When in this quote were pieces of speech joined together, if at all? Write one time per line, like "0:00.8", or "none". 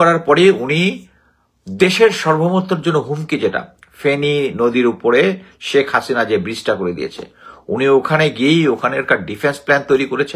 none